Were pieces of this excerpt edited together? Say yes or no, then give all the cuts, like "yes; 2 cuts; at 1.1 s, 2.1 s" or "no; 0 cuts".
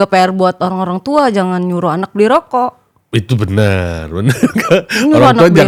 no; 0 cuts